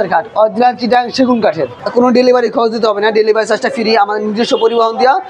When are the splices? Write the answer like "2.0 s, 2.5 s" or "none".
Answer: 1.8 s